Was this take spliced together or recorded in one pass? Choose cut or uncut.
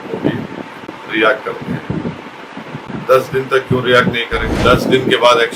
cut